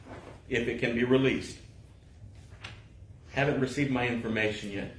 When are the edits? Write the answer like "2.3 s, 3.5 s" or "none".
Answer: none